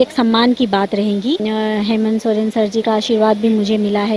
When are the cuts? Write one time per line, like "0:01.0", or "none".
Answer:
0:01.4